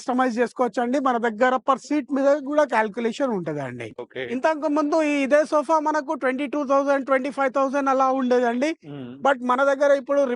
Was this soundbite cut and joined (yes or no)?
yes